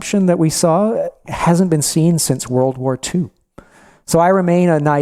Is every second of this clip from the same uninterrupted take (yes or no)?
yes